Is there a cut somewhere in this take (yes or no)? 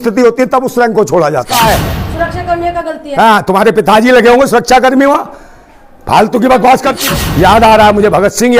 yes